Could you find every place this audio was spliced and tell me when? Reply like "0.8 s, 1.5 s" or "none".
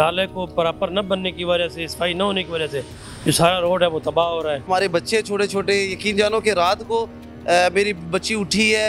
4.7 s